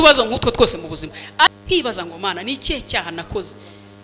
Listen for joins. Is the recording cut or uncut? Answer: cut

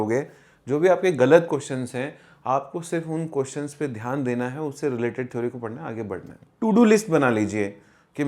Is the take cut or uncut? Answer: cut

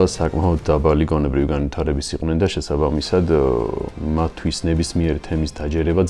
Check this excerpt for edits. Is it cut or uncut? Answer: uncut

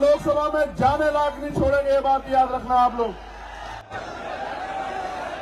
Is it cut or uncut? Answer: cut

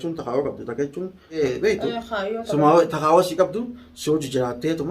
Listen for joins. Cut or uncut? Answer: cut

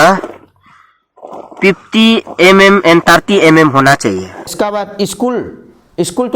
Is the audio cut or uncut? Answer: cut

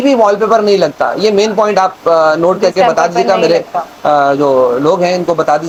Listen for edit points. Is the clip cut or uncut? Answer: uncut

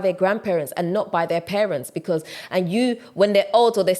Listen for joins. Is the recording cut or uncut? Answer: cut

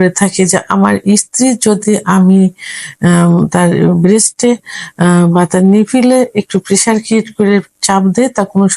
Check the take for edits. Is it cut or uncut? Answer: uncut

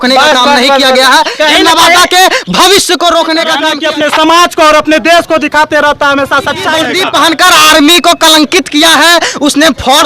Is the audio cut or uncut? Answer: cut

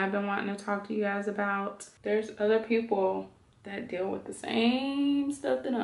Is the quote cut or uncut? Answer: cut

